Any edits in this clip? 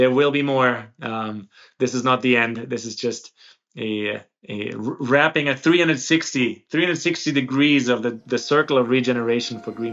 no; 0 cuts

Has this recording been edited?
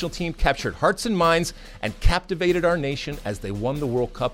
no; 0 cuts

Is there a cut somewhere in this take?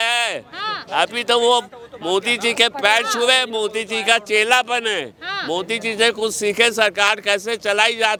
no; 0 cuts

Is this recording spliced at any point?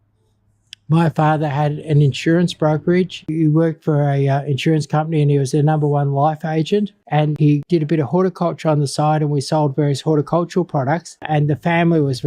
no; 0 cuts

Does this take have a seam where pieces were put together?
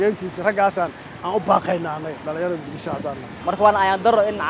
yes; 1 cut; at 3.4 s

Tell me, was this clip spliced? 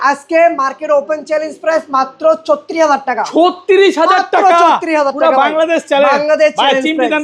no; 0 cuts

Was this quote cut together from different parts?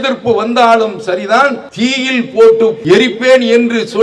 yes; 2 cuts; at 1.7 s, 2.8 s

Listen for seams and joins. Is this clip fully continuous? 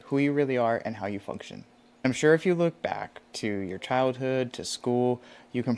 no; 1 cut; at 2.0 s

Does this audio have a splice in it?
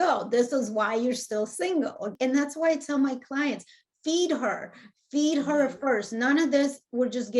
yes; 1 cut; at 2.1 s

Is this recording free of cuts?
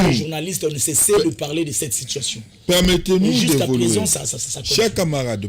yes; 0 cuts

